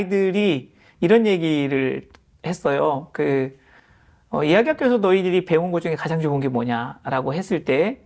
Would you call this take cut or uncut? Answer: uncut